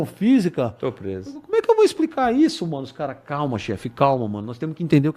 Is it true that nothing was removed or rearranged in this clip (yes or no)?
yes